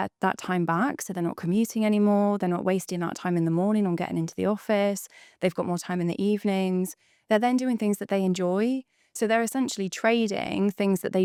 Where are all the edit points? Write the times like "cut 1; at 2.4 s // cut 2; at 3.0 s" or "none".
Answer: none